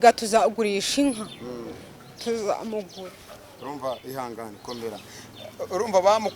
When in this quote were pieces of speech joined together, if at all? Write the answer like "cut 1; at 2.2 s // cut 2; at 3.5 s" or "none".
cut 1; at 2.9 s